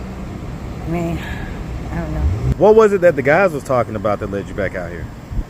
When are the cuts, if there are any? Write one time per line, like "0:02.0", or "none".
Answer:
0:02.4